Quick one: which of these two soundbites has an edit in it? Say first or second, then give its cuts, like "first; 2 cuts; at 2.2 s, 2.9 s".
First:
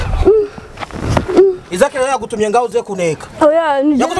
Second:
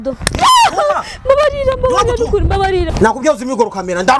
second; 1 cut; at 2.9 s